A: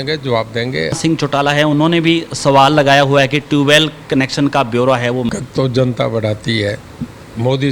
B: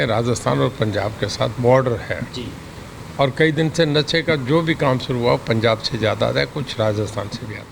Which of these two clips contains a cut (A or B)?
A